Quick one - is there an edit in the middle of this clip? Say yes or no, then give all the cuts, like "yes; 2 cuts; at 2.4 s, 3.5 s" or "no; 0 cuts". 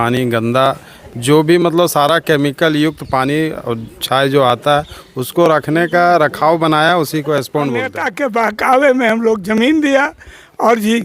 yes; 1 cut; at 8.0 s